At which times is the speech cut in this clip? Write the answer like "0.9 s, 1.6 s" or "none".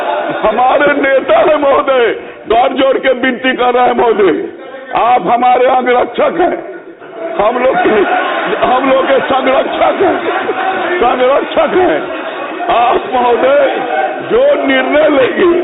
2.3 s